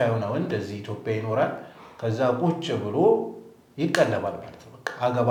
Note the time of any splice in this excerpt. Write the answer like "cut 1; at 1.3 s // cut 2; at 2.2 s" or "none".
none